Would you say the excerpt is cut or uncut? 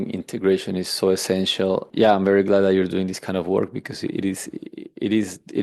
cut